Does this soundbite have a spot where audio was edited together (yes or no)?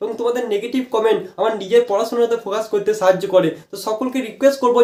no